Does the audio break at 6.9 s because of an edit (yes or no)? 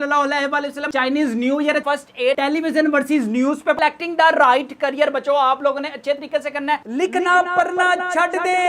yes